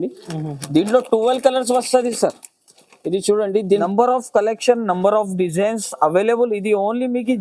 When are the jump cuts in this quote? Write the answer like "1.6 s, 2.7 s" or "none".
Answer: 3.8 s